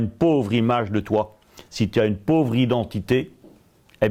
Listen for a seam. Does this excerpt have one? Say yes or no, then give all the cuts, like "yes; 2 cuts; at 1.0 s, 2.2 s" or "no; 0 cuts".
no; 0 cuts